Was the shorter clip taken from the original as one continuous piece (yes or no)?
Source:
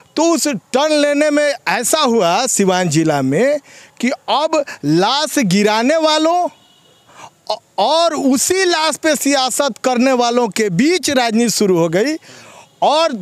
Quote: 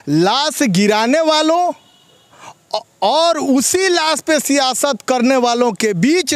yes